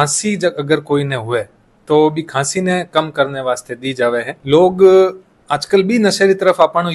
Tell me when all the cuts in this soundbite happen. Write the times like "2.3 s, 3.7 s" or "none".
4.4 s